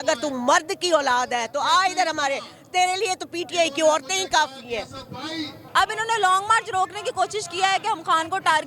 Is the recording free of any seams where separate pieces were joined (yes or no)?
no